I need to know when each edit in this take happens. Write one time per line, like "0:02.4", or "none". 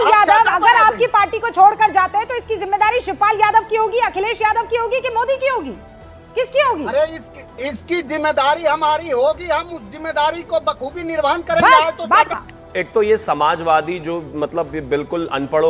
0:12.3